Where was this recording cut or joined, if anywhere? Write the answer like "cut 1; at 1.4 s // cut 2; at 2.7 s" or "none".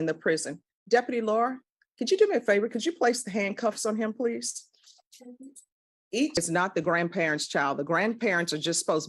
cut 1; at 6.4 s